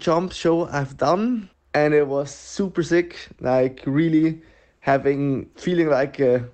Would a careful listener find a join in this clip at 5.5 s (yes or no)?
yes